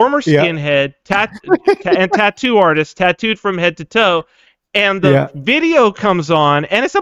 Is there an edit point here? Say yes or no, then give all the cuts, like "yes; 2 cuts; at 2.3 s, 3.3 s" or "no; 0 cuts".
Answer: no; 0 cuts